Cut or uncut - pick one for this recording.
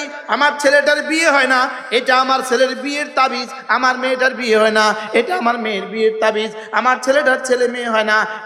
uncut